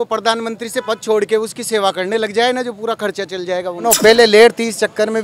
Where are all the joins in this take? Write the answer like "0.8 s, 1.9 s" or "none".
3.8 s

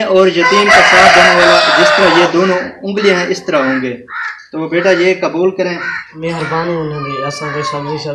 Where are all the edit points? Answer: 6.1 s

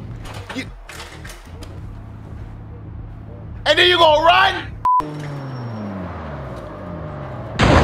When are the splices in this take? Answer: 5.0 s

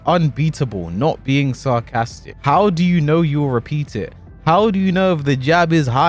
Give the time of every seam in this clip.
2.3 s

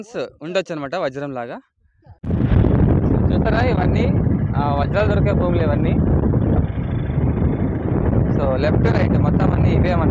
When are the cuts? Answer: 2.5 s

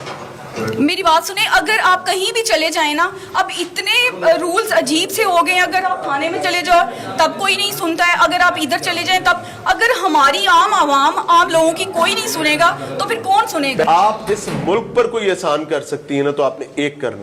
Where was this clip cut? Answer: none

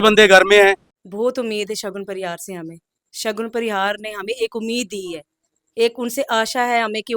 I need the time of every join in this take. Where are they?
1.0 s

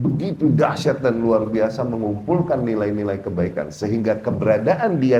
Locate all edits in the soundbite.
none

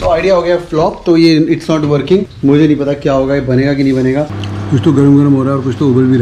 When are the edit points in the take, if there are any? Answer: 2.3 s, 4.3 s

